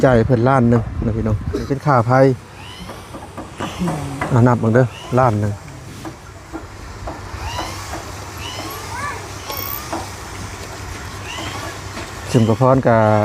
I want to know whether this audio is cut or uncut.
cut